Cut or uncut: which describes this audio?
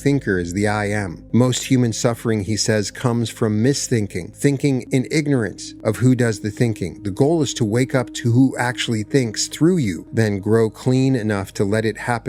cut